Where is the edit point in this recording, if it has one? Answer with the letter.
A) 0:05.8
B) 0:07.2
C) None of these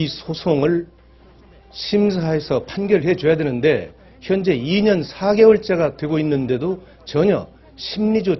C